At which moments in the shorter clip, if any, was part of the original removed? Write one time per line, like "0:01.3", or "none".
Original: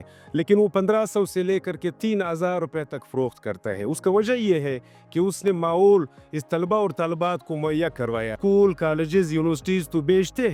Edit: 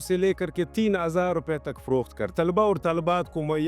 0:02.2